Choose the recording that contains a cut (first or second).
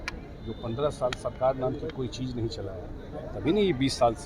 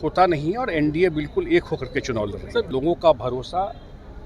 second